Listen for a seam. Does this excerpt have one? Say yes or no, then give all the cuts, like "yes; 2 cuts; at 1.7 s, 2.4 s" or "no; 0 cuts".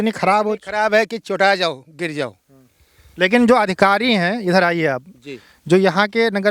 no; 0 cuts